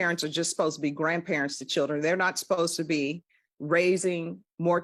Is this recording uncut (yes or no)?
yes